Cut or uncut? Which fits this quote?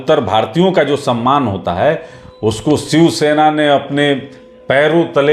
uncut